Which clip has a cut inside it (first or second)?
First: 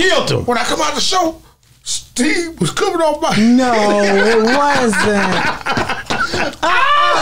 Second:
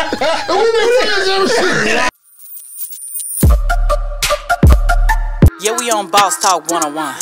second